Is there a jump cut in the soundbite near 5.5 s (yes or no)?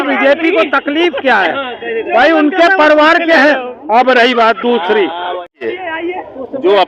yes